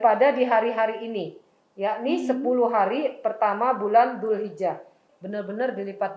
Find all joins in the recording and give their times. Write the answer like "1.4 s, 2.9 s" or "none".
5.0 s

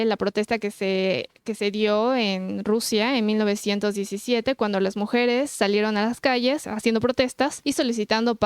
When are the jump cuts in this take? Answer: 6.7 s, 7.6 s

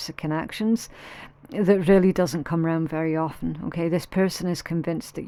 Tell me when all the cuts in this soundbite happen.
none

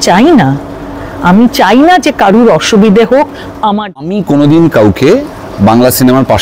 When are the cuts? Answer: 4.0 s

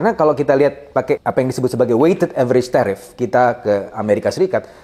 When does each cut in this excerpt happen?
1.2 s

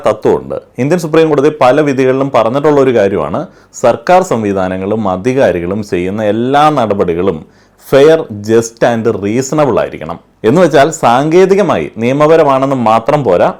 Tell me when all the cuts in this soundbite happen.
none

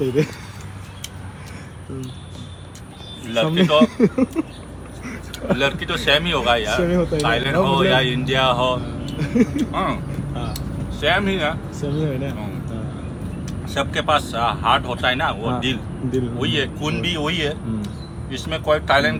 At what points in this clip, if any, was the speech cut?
none

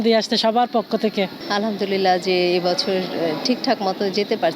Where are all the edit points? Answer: 1.4 s

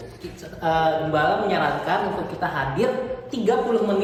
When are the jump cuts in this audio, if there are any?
none

